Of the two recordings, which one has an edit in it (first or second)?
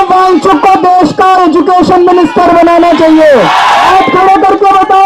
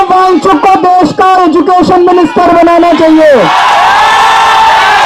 first